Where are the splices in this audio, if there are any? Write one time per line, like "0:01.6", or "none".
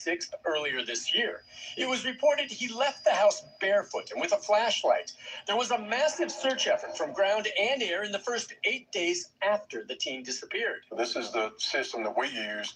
none